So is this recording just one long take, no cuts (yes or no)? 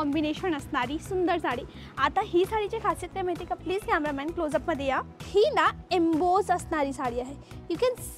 yes